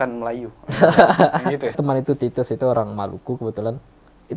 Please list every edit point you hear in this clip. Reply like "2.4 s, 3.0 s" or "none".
1.8 s

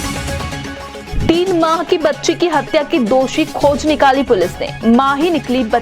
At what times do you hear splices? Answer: 1.0 s

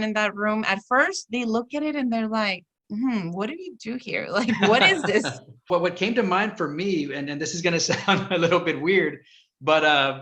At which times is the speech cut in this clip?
5.7 s

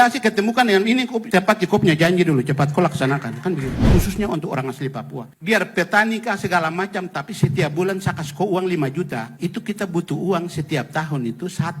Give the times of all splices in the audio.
1.2 s, 3.9 s, 5.3 s, 9.3 s

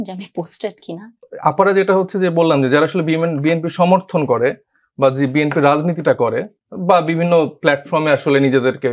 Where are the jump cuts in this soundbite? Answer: 1.2 s

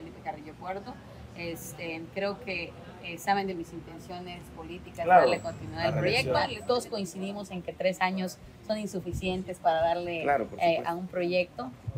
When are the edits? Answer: 6.5 s

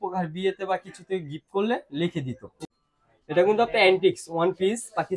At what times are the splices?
2.6 s

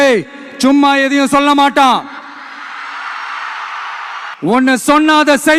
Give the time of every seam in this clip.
4.3 s

